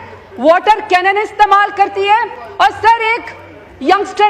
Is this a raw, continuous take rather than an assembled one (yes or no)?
yes